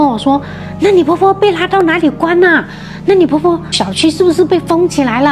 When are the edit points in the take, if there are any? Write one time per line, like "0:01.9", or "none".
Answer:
none